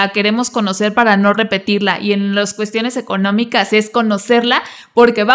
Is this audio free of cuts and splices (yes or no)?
yes